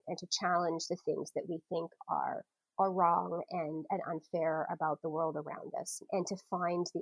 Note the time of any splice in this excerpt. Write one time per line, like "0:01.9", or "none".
0:06.0